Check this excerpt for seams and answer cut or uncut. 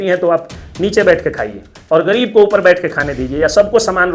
uncut